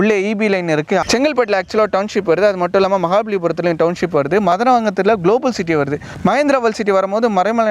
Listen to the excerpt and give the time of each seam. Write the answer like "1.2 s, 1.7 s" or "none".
1.0 s, 6.1 s